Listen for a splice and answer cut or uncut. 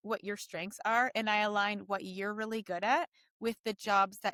uncut